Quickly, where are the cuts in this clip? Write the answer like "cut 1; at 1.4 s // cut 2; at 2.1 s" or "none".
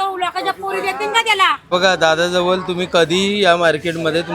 cut 1; at 1.6 s